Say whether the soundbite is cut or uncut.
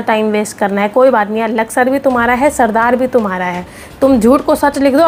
uncut